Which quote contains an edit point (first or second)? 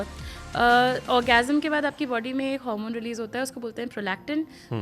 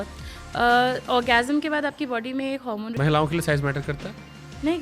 second